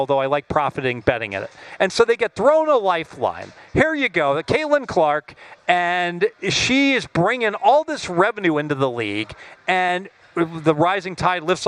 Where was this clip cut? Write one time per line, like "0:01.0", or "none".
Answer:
none